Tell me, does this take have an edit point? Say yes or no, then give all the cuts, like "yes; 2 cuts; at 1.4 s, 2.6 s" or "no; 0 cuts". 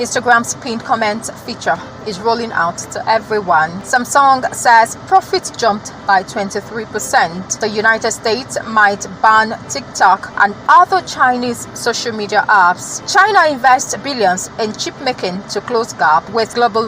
yes; 1 cut; at 13.0 s